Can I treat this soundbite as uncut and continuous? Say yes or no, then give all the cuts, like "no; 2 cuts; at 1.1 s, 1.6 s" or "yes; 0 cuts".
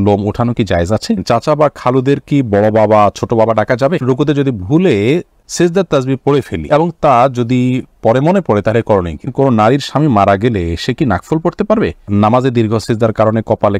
no; 6 cuts; at 1.2 s, 4.0 s, 5.4 s, 6.6 s, 9.3 s, 12.0 s